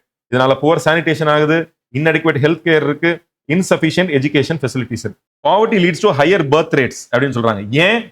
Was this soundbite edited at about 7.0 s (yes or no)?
no